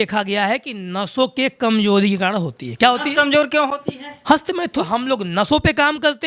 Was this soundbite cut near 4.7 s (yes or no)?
yes